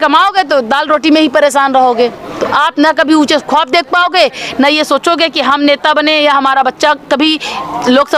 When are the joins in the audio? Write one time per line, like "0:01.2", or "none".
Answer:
none